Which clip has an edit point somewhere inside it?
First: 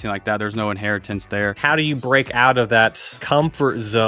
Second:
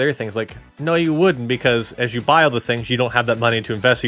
first; 2 cuts; at 1.6 s, 3.2 s

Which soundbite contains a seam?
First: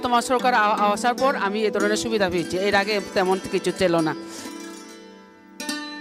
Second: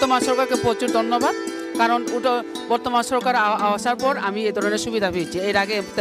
first; 1 cut; at 4.1 s

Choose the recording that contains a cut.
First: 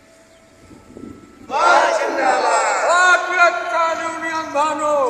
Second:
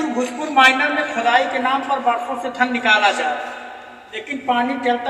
first; 1 cut; at 1.5 s

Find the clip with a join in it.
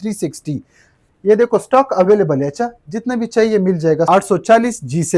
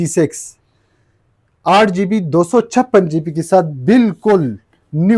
first; 1 cut; at 4.1 s

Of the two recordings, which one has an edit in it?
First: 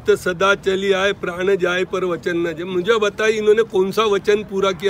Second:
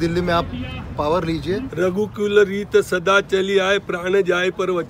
second; 1 cut; at 1.7 s

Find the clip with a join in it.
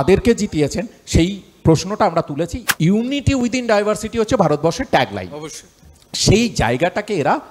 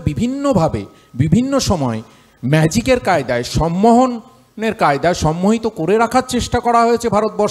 first; 1 cut; at 2.6 s

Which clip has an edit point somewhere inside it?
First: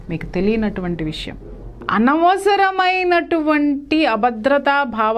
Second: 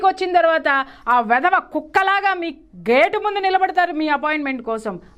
first; 1 cut; at 1.7 s

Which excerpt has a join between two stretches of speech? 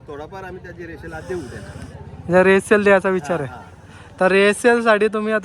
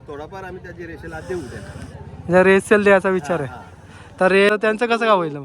second; 1 cut; at 4.5 s

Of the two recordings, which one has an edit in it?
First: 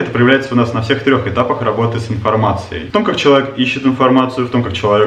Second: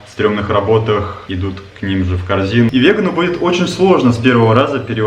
second; 2 cuts; at 1.2 s, 2.7 s

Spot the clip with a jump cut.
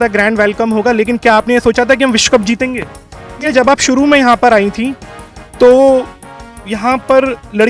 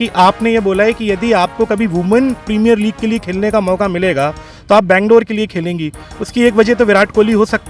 first; 1 cut; at 3.5 s

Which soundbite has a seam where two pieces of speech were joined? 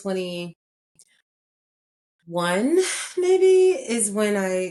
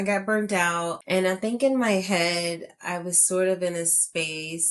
second; 1 cut; at 1.0 s

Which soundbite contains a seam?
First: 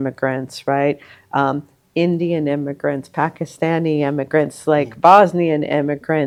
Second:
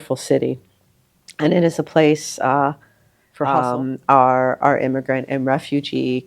second; 1 cut; at 3.5 s

